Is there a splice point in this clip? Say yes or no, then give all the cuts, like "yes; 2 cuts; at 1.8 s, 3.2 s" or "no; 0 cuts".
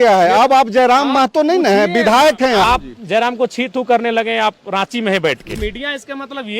yes; 2 cuts; at 2.6 s, 5.6 s